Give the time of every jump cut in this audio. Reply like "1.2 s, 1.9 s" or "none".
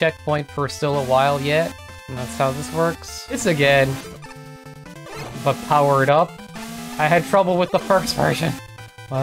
3.4 s, 5.3 s

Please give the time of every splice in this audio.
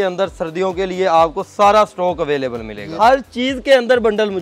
2.9 s

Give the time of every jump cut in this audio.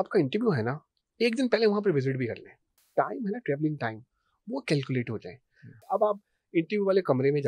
2.8 s, 5.9 s

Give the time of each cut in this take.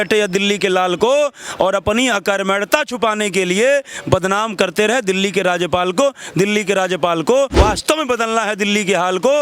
7.5 s

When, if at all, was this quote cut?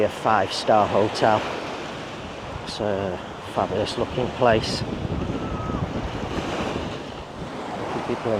none

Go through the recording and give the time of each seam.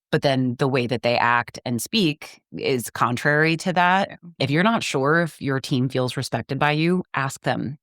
4.3 s

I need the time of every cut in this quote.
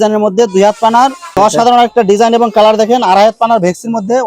1.2 s

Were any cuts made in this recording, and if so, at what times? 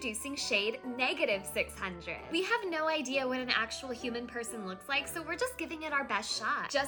none

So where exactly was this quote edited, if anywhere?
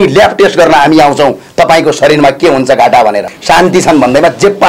3.3 s

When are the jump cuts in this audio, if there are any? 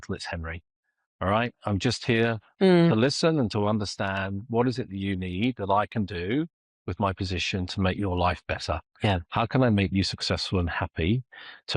none

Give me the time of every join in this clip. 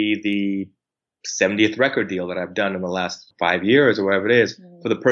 3.2 s

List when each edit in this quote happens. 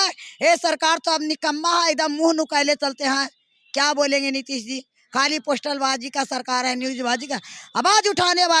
none

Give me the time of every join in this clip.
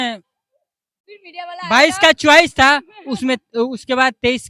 none

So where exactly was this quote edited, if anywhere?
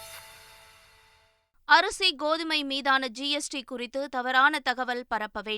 1.3 s

